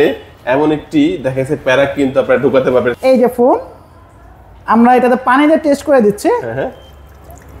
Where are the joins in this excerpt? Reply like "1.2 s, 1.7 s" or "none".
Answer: 3.0 s